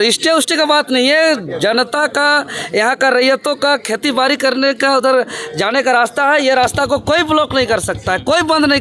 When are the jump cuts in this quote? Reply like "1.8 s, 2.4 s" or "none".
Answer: none